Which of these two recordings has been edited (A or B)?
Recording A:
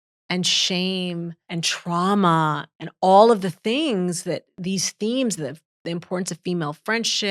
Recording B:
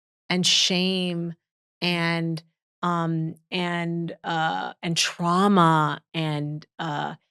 A